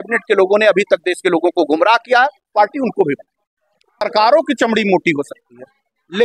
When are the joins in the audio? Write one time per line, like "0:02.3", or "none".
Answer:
0:04.1